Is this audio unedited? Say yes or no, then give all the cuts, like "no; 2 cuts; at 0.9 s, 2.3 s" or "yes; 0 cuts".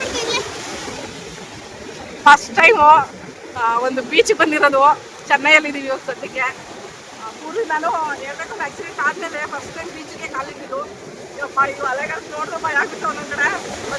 yes; 0 cuts